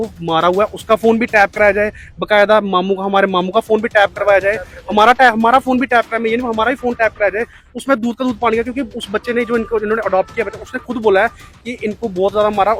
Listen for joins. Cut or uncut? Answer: uncut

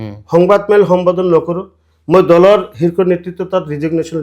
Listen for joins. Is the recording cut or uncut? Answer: uncut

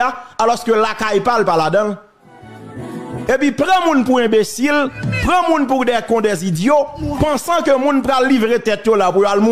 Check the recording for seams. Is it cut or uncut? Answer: uncut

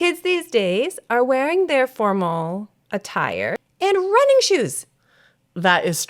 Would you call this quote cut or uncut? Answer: cut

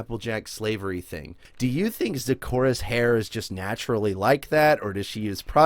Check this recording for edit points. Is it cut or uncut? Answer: cut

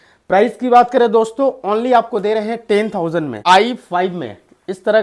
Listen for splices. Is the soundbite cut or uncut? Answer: cut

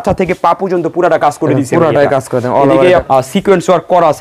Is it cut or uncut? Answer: cut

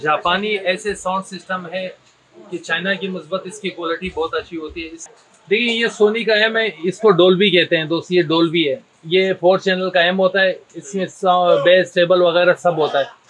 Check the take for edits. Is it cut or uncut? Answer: cut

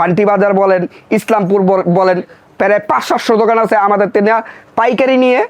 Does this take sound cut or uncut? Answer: uncut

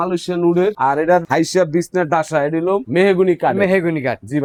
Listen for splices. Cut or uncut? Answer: uncut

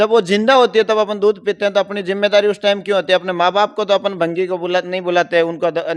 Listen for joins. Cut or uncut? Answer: uncut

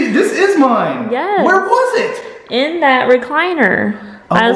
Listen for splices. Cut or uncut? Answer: uncut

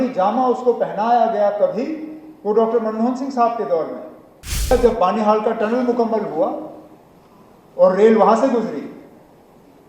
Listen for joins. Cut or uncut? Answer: cut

